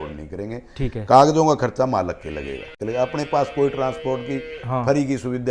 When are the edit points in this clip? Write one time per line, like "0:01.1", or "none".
0:02.7